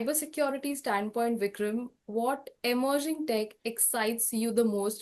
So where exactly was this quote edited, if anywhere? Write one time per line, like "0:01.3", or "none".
none

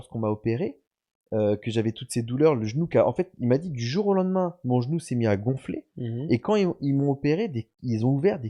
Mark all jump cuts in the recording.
none

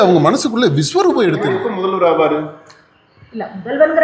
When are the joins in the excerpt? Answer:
0:01.6

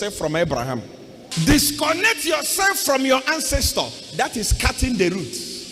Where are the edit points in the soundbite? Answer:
0:01.2

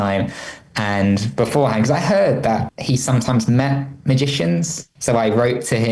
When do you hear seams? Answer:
0:02.7
0:04.8

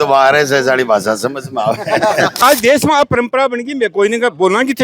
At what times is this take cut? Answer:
0:02.4

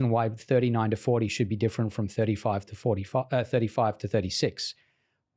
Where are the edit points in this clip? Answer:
none

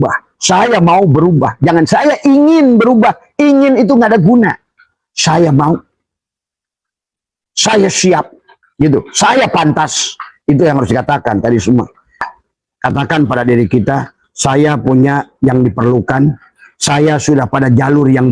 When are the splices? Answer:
0:12.2

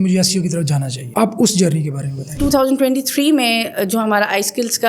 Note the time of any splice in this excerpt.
0:01.0
0:02.4

